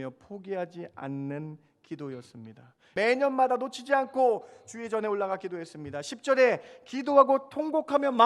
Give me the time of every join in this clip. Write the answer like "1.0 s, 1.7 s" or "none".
2.9 s